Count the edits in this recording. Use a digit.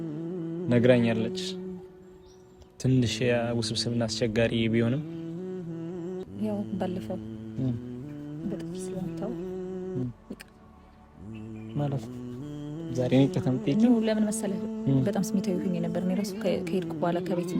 1